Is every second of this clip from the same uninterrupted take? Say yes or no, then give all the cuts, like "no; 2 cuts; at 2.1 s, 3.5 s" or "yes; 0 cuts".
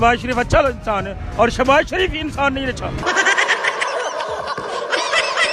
yes; 0 cuts